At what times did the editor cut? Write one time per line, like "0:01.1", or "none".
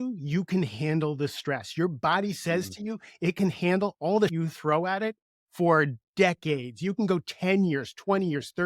0:04.3

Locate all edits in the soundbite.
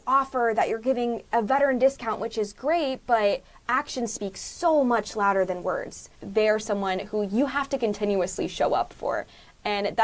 0:06.2

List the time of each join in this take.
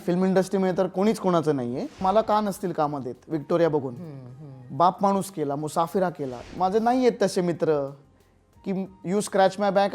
0:02.0
0:06.3

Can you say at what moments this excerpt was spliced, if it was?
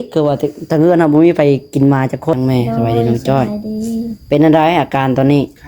0:02.3

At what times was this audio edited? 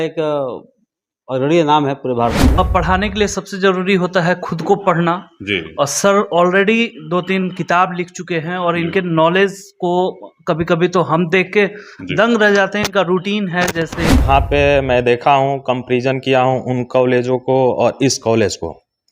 0:02.6
0:14.2

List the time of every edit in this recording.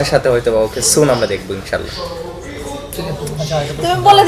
none

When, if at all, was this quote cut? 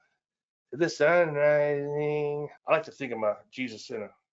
0:02.5

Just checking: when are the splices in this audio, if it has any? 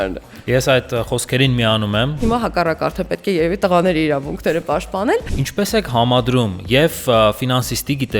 0:02.2
0:05.4

